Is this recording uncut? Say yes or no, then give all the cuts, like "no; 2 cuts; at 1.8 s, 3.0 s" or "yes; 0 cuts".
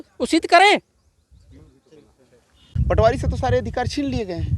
no; 1 cut; at 2.6 s